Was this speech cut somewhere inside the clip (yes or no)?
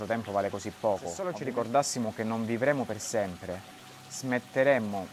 yes